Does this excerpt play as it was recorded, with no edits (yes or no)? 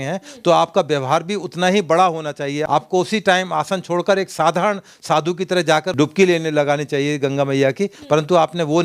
no